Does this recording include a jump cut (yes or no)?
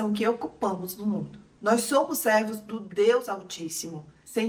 no